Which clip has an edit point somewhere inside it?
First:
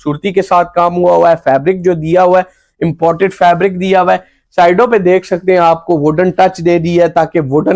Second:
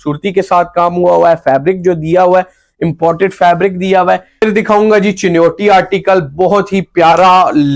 second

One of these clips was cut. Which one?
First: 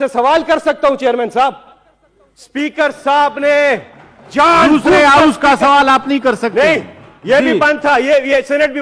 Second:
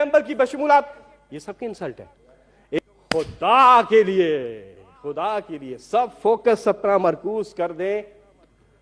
second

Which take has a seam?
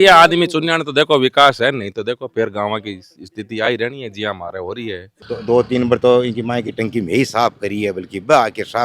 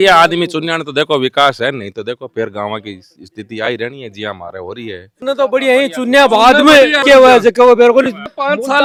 first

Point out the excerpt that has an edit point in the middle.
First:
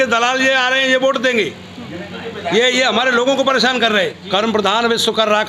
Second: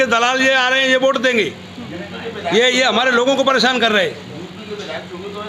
first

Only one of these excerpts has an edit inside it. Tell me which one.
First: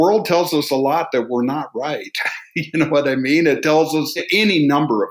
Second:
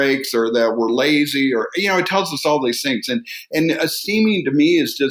first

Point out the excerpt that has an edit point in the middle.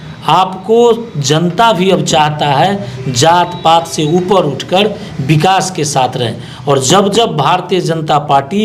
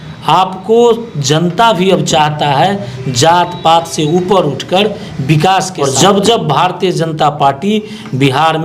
second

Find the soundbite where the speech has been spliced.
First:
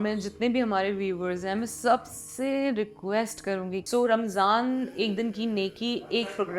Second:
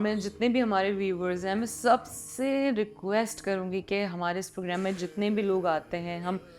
first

